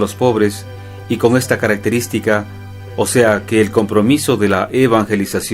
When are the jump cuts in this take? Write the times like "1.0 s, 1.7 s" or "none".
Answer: 2.6 s